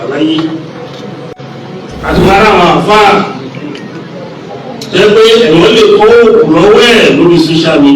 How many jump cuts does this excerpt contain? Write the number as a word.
one